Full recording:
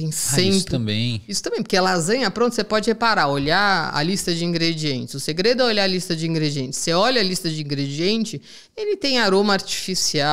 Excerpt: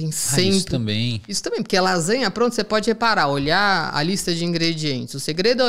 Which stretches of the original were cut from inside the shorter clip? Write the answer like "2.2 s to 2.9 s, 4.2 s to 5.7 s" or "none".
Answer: none